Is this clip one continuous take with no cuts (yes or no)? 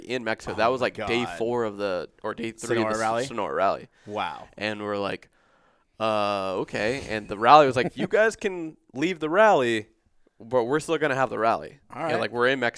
yes